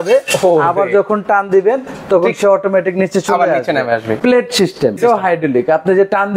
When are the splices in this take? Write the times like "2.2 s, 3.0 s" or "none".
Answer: 4.1 s, 5.0 s